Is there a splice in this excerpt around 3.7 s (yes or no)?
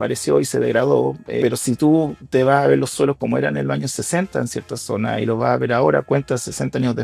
no